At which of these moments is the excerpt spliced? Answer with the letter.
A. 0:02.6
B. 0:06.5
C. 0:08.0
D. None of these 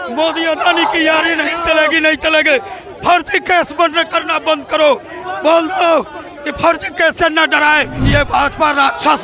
C